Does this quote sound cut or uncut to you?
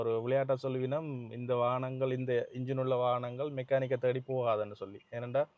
uncut